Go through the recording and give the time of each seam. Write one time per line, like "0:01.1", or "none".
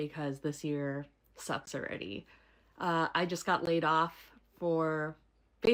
none